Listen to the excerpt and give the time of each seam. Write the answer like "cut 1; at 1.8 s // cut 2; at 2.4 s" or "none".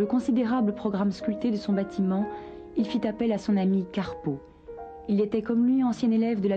cut 1; at 2.4 s